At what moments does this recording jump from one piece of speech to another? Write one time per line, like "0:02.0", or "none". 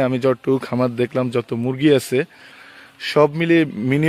none